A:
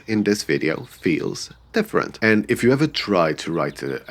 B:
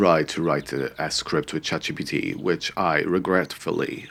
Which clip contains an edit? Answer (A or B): A